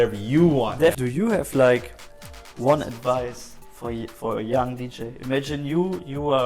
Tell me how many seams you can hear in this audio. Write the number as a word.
one